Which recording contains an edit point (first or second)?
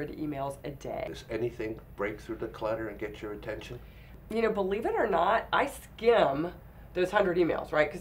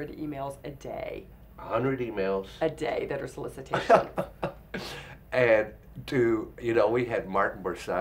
first